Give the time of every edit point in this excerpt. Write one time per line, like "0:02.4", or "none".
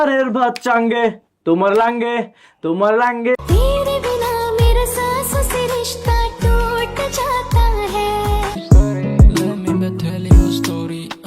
0:02.3
0:03.4
0:08.6

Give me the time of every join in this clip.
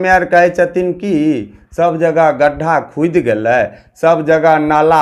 none

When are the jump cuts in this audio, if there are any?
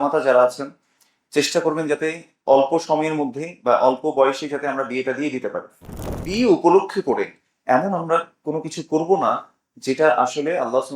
0:06.0

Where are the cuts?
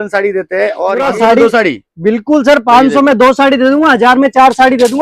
0:01.0

